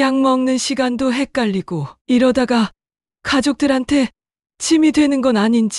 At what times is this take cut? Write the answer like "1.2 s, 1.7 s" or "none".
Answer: none